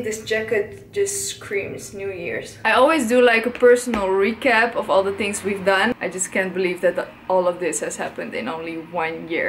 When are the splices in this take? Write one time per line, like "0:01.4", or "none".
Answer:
0:02.5
0:06.0